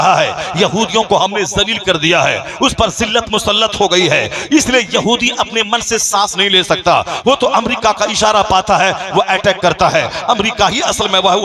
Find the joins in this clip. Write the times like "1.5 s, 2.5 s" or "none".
none